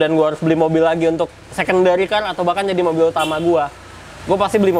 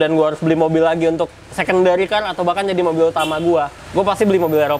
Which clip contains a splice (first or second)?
second